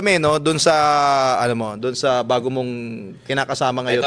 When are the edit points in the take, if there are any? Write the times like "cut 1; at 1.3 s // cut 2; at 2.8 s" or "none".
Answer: none